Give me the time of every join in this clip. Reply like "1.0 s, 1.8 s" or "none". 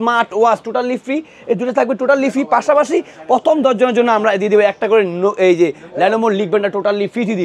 none